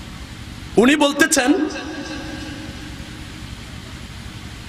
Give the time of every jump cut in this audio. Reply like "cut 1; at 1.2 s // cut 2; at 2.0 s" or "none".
none